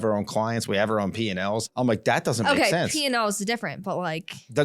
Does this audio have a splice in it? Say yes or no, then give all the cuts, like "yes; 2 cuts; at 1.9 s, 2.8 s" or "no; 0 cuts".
yes; 1 cut; at 1.7 s